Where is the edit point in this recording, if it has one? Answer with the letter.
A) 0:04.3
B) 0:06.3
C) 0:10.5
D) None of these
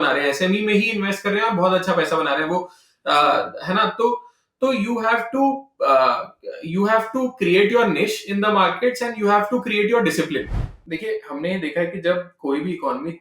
C